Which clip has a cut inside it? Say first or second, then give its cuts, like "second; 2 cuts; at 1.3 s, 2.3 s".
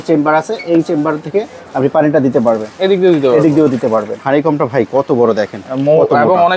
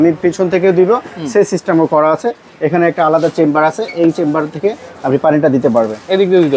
first; 1 cut; at 4.2 s